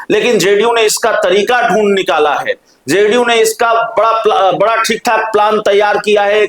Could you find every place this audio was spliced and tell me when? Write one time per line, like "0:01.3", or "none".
none